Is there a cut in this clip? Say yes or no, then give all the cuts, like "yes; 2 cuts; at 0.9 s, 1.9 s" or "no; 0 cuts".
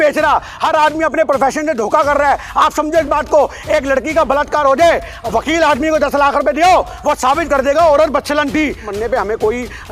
yes; 1 cut; at 8.9 s